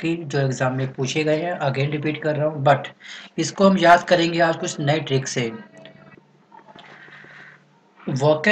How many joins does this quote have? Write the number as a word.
zero